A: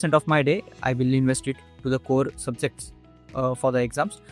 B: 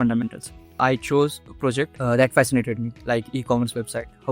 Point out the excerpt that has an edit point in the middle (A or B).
B